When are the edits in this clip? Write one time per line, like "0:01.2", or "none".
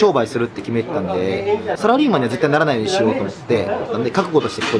0:01.8
0:03.9